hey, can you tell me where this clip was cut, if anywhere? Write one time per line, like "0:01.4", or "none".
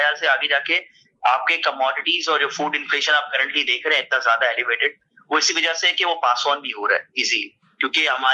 none